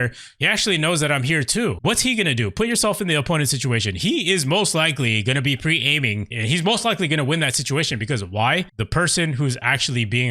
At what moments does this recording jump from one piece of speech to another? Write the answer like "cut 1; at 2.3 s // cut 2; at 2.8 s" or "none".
cut 1; at 1.8 s // cut 2; at 6.3 s // cut 3; at 8.8 s